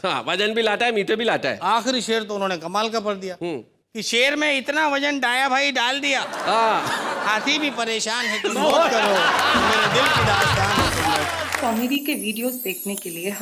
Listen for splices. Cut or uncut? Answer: cut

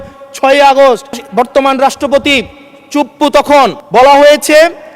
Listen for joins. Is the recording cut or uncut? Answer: cut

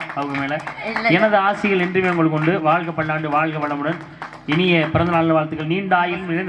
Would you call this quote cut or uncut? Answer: uncut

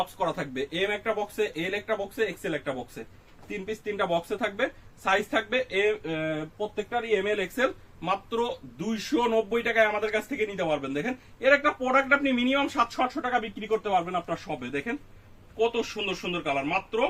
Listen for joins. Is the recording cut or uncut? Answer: uncut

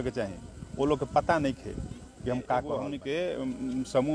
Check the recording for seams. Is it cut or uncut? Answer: cut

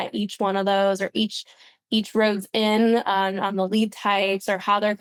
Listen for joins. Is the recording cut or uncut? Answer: uncut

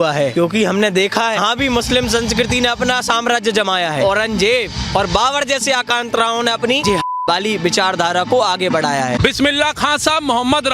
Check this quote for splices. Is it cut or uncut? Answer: cut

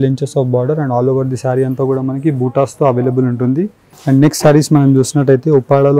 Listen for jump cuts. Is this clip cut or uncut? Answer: cut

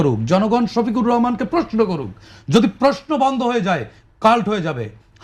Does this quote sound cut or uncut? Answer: uncut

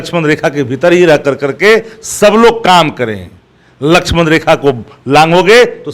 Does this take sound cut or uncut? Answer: uncut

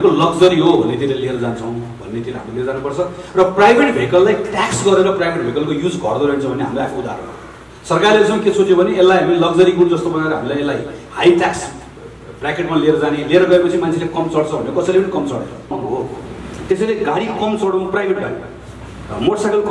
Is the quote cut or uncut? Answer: cut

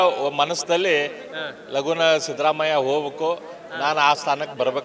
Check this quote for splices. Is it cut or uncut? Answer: uncut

